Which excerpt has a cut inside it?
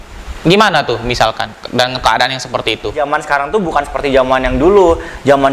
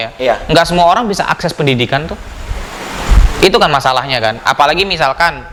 first; 1 cut; at 3.0 s

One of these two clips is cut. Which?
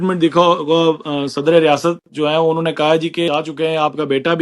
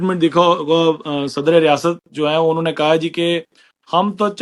first; 1 cut; at 3.3 s

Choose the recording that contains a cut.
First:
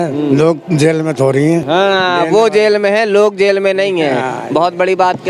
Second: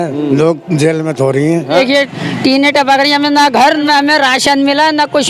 second; 2 cuts; at 1.7 s, 3.8 s

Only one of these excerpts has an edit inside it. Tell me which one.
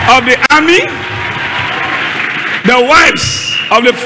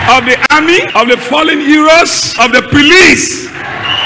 second; 2 cuts; at 0.9 s, 2.3 s

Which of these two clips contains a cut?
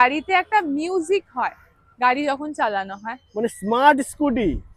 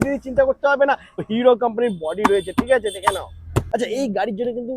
second; 2 cuts; at 1.3 s, 3.7 s

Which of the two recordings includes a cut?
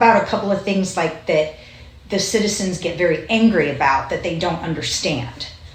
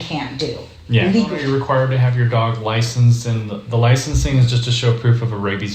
second; 1 cut; at 1.4 s

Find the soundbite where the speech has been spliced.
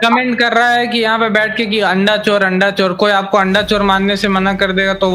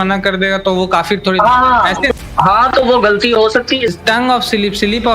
second; 2 cuts; at 2.1 s, 3.9 s

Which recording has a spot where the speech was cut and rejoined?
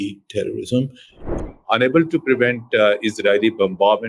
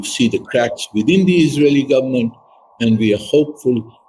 first; 1 cut; at 1.2 s

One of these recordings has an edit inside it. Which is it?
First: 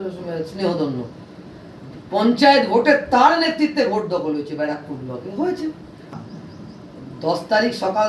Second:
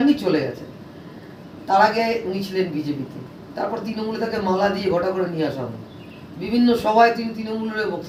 first; 1 cut; at 6.0 s

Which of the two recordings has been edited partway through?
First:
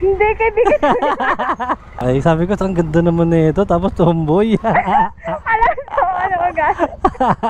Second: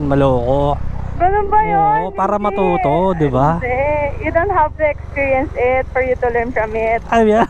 first; 1 cut; at 2.0 s

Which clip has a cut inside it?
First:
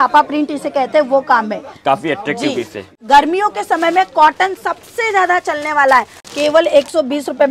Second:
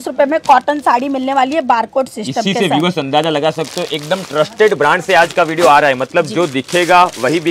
first; 2 cuts; at 2.8 s, 6.3 s

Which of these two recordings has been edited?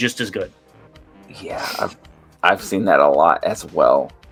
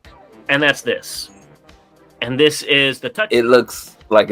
second; 1 cut; at 3.0 s

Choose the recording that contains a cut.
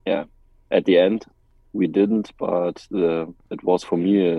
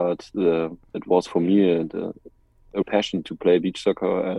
second; 1 cut; at 2.8 s

